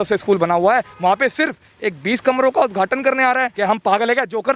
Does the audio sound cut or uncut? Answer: cut